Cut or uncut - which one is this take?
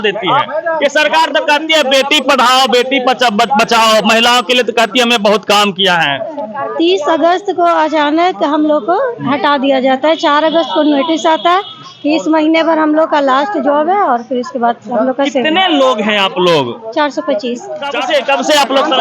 cut